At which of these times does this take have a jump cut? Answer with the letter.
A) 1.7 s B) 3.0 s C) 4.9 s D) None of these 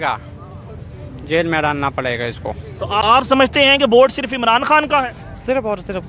B